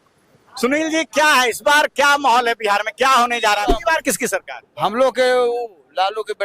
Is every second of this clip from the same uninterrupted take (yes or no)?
no